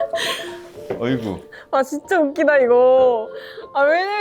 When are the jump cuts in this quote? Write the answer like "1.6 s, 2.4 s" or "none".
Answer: none